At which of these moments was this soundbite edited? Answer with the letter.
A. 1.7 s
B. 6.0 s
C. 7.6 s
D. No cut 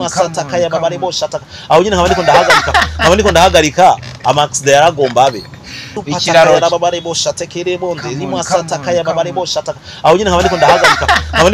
B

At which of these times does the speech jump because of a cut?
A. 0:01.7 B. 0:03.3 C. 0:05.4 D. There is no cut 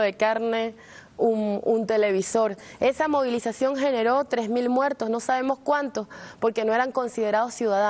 C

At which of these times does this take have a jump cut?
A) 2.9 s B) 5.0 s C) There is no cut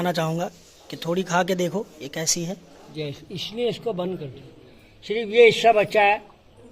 A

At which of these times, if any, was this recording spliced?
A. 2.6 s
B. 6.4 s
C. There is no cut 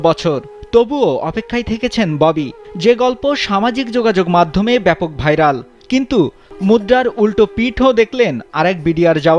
B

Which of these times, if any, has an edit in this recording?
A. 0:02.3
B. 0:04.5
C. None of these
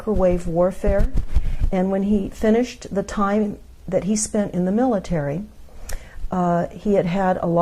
A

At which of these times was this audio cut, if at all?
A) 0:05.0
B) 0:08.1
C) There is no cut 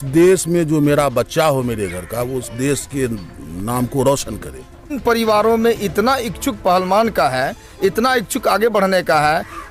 A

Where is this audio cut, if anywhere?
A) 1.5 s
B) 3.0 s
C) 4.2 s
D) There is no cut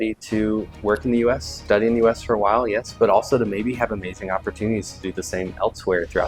D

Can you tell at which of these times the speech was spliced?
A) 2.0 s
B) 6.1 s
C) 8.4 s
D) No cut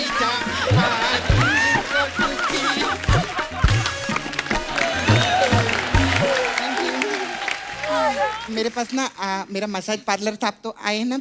C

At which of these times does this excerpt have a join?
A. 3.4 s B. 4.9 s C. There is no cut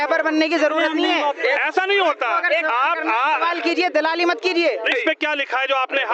B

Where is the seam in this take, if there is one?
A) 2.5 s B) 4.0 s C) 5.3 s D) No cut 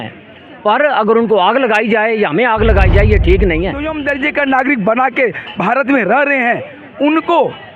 B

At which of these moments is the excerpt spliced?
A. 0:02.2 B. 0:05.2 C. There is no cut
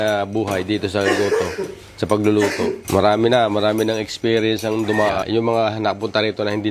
B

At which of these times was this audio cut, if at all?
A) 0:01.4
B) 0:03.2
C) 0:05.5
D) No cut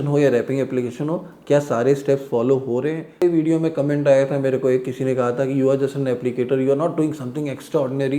B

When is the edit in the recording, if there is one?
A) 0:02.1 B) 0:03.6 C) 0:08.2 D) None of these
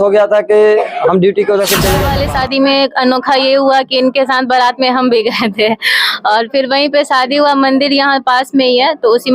A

